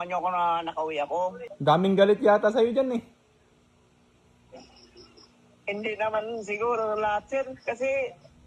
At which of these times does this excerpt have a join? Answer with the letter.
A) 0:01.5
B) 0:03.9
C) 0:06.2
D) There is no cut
A